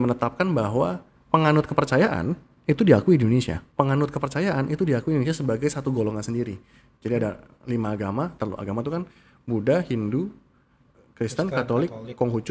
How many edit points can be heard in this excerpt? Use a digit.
1